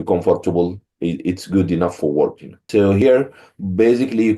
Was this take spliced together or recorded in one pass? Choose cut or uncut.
cut